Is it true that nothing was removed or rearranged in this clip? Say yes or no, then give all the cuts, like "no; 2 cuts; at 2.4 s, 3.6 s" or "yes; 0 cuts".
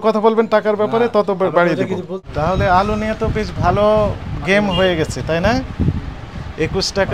no; 1 cut; at 2.2 s